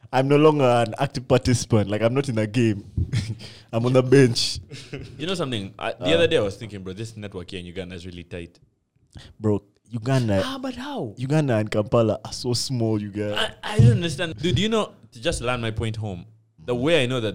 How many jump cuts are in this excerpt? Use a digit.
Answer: 1